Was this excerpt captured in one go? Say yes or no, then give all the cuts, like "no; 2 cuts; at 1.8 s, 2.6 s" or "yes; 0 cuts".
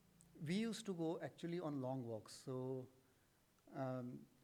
yes; 0 cuts